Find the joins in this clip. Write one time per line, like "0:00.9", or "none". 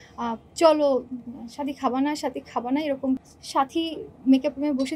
0:03.2